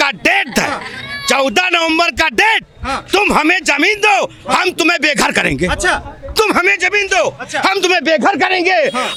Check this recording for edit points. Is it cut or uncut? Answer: uncut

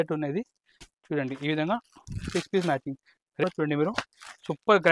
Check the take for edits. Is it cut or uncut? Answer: cut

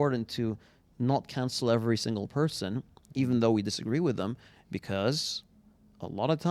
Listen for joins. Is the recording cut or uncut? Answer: uncut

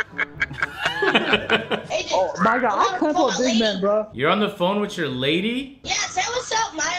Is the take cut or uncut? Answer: cut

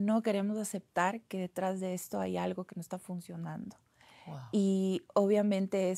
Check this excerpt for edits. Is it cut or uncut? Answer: uncut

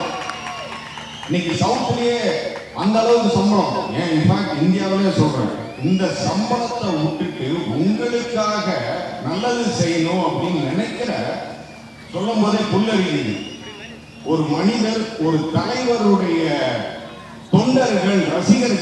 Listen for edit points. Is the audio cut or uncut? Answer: uncut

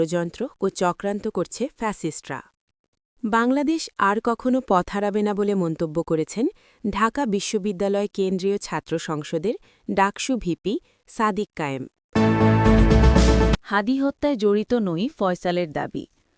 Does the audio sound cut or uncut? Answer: cut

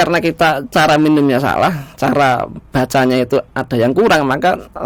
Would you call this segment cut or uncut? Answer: uncut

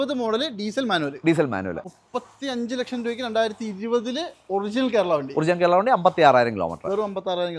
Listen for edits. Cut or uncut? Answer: cut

